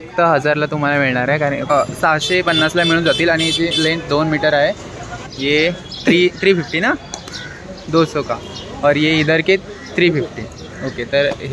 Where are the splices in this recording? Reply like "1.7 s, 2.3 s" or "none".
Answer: 1.7 s, 5.2 s